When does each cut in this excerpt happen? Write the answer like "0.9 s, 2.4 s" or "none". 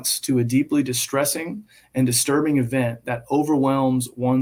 none